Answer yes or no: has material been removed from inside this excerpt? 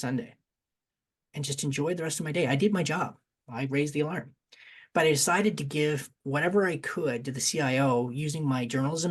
no